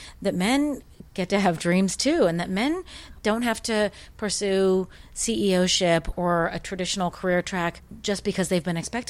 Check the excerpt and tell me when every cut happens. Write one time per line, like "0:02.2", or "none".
0:03.1
0:06.1
0:07.9